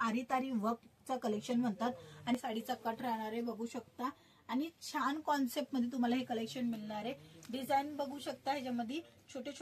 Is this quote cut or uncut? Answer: cut